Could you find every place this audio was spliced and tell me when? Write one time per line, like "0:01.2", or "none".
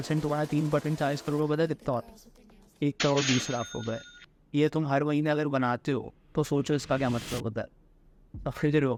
none